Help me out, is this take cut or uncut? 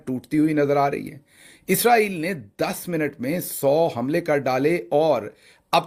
uncut